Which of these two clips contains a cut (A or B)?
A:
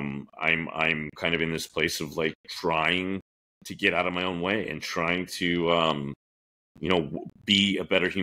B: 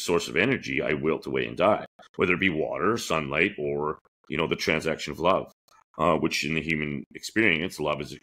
A